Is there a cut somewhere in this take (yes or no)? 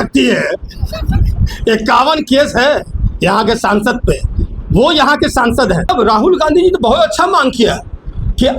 yes